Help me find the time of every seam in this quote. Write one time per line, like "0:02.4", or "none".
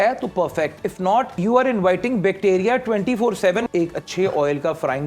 0:01.3
0:03.7